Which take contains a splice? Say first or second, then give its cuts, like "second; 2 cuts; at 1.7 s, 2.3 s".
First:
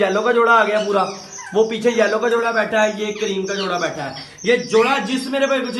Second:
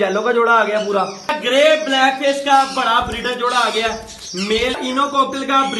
second; 2 cuts; at 1.2 s, 4.8 s